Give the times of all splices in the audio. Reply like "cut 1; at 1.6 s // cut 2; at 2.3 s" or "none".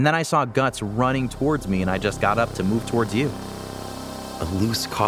cut 1; at 3.8 s